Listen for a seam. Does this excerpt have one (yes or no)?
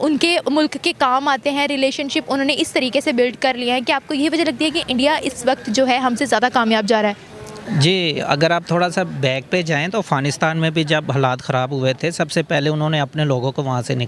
no